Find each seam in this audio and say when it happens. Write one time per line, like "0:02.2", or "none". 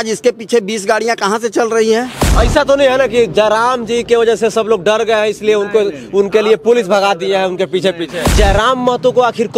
0:02.2
0:08.3

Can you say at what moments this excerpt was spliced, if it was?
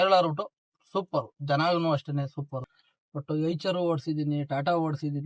0:02.6

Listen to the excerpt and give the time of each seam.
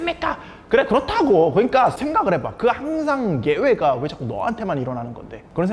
0:02.0

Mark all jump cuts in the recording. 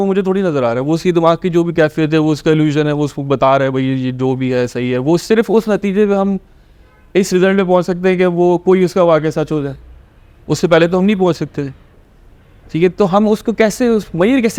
none

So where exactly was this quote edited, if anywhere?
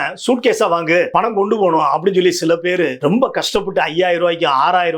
0:01.1
0:03.0

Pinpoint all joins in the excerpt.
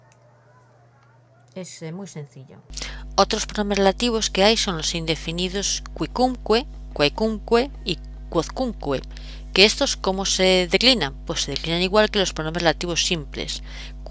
0:06.8

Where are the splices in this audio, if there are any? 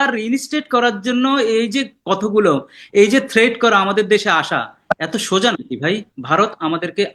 0:06.1

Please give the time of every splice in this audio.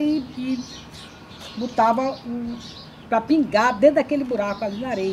none

